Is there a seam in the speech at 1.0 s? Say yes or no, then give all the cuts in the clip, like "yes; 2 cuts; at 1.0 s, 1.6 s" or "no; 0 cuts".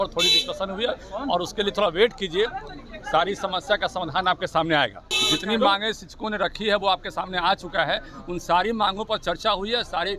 no; 1 cut; at 5.1 s